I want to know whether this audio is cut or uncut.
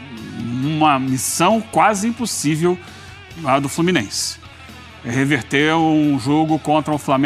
uncut